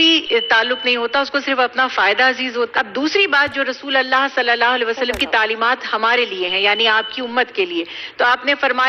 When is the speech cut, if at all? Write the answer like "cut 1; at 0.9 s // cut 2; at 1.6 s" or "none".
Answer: cut 1; at 2.7 s